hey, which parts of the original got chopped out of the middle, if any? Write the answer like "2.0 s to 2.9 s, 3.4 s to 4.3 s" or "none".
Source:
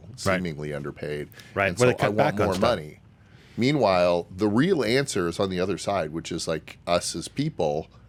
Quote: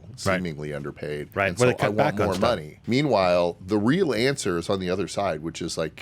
1.3 s to 1.5 s, 2.9 s to 3.4 s